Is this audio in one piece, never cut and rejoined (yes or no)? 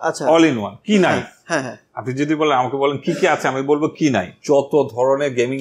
no